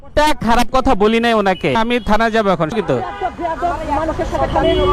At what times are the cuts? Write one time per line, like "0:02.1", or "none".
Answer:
0:01.7
0:02.7